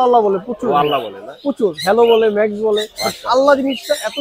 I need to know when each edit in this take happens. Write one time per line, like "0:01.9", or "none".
none